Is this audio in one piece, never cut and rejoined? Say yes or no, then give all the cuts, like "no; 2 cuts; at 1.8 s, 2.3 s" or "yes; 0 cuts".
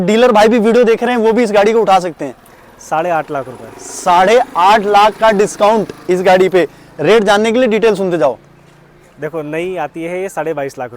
yes; 0 cuts